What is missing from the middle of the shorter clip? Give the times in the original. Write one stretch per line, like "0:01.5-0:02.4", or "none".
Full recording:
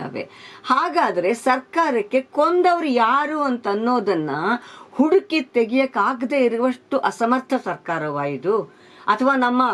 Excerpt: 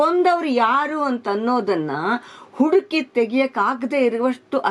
none